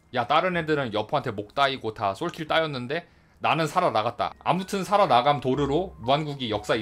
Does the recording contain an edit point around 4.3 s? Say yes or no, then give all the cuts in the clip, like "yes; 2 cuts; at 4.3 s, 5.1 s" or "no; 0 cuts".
yes; 1 cut; at 4.3 s